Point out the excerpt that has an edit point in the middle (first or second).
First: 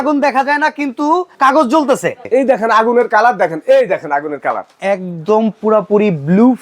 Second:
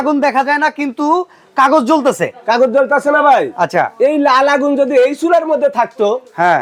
first